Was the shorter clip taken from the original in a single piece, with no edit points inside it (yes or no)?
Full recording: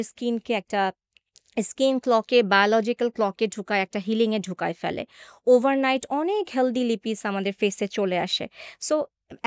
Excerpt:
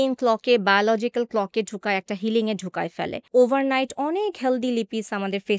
no